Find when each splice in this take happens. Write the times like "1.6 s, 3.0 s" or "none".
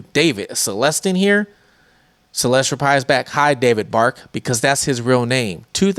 none